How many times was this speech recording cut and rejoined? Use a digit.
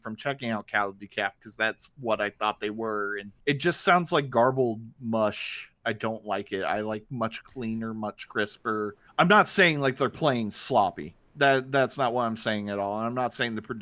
3